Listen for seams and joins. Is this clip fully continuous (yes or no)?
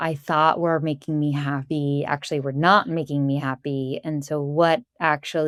yes